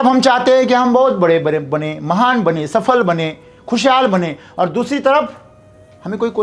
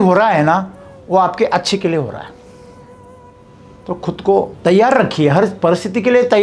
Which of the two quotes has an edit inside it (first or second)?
second